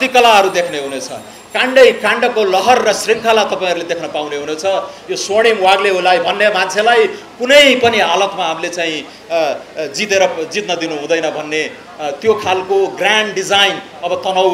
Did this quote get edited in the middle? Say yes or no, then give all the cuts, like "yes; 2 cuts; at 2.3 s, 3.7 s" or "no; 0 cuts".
no; 0 cuts